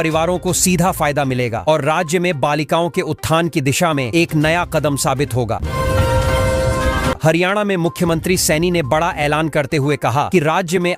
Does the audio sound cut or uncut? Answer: cut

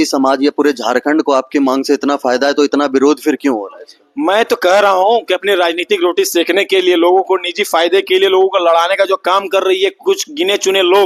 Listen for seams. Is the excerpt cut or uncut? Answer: uncut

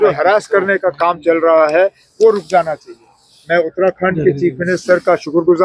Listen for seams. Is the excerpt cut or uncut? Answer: uncut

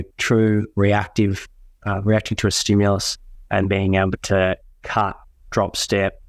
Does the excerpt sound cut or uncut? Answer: cut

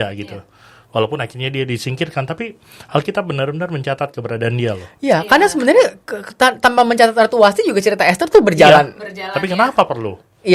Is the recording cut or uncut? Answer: uncut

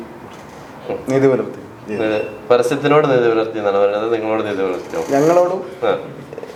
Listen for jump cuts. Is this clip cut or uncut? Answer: uncut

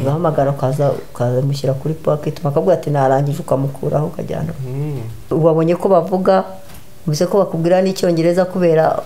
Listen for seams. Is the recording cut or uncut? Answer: cut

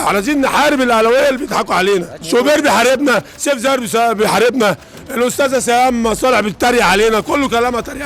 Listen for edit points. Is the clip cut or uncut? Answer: cut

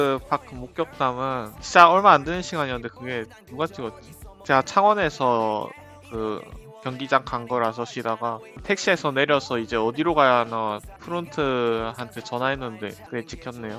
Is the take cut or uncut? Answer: uncut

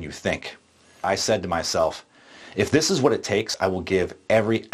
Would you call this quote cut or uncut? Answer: cut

